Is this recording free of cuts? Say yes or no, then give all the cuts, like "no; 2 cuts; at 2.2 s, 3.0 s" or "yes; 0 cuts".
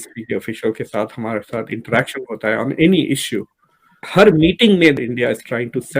no; 1 cut; at 5.0 s